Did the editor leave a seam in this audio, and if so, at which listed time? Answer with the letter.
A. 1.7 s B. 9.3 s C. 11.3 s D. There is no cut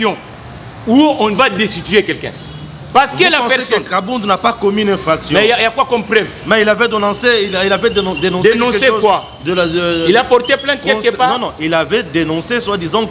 D